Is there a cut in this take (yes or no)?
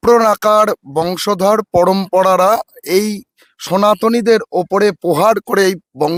no